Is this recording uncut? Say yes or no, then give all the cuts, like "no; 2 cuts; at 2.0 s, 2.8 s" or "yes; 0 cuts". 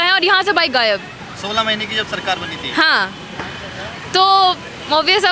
yes; 0 cuts